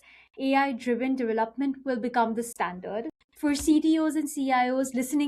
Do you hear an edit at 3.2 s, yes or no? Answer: yes